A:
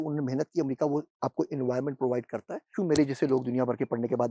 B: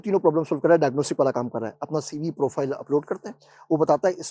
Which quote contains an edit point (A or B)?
A